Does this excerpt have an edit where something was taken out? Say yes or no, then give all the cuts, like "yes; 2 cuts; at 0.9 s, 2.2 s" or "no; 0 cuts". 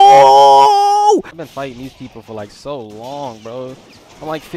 yes; 1 cut; at 1.3 s